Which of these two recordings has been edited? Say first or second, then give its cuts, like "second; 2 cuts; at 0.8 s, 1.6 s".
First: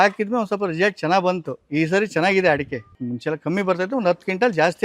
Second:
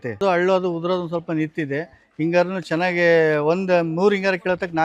first; 1 cut; at 2.9 s